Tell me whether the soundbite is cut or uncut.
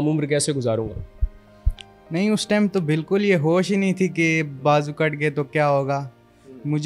uncut